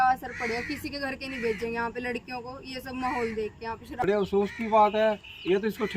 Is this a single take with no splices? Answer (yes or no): no